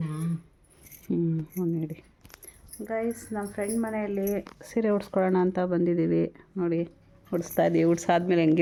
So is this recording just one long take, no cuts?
yes; 0 cuts

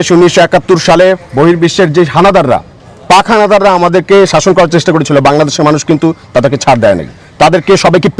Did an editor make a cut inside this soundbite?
no; 0 cuts

